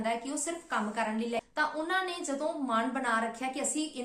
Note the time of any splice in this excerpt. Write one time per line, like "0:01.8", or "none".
0:01.4